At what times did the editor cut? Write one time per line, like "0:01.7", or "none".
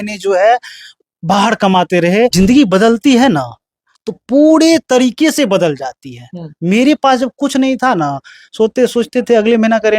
0:02.3